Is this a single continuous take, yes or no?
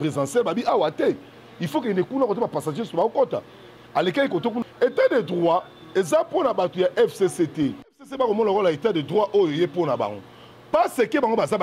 no